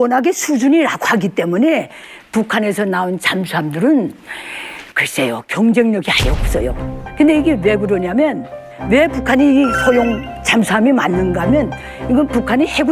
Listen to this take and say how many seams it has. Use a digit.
0